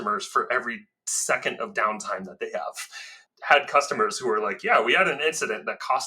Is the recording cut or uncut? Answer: cut